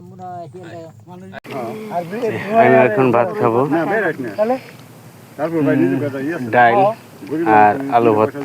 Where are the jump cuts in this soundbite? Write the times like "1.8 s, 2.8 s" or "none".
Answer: 1.3 s